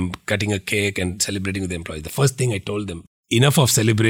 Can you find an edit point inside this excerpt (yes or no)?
yes